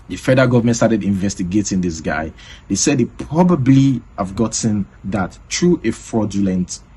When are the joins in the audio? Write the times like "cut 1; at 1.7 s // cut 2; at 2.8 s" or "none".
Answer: none